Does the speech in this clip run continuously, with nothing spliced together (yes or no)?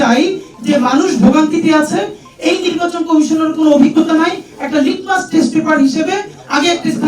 yes